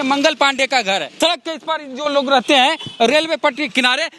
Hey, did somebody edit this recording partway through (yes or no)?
yes